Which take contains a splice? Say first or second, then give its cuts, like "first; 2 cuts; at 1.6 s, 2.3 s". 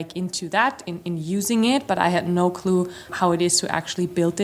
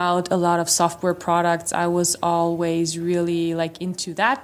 first; 1 cut; at 3.1 s